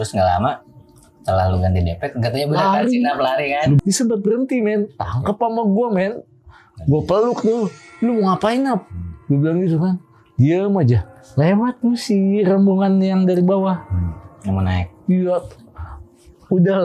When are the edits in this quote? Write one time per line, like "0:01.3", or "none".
0:03.8